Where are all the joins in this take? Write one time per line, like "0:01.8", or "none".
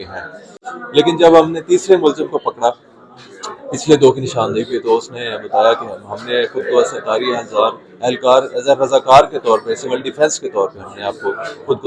none